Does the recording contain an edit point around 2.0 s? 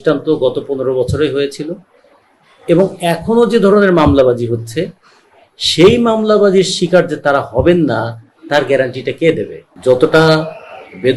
no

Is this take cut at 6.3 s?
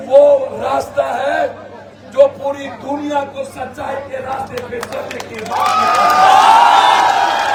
no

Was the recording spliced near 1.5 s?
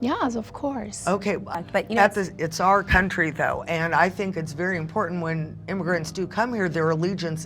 yes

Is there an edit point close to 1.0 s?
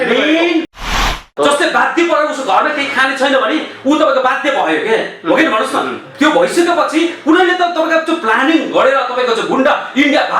yes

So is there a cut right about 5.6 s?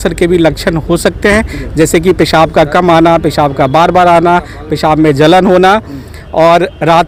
no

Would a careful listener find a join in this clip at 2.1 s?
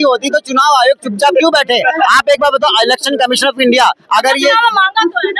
no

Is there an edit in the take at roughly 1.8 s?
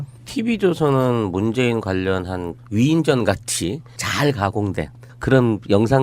no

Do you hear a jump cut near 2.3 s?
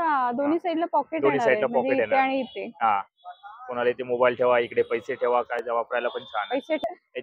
no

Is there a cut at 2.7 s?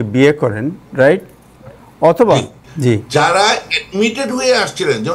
yes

